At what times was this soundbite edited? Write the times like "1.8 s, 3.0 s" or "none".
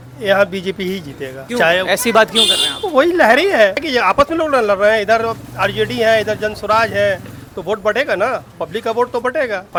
none